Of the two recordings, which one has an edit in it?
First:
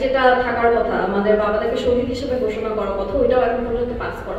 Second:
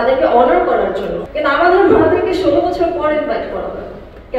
second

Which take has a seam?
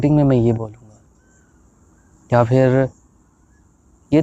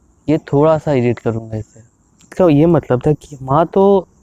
second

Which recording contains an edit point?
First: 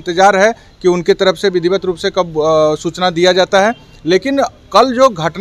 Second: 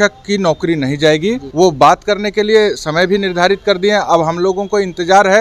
second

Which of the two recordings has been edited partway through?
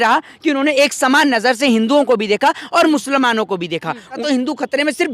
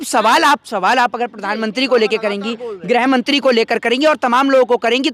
first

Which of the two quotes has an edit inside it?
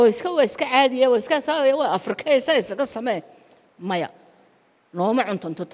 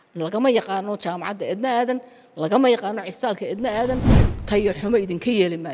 second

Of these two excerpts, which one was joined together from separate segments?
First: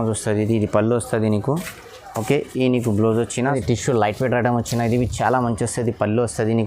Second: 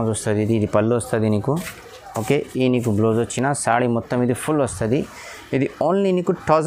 first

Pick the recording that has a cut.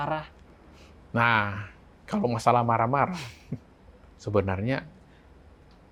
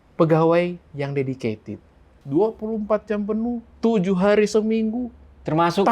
second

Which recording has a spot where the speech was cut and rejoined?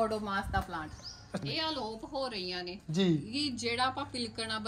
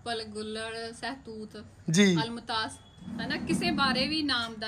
first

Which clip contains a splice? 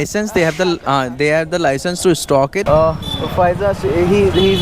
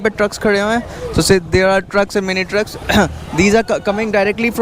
first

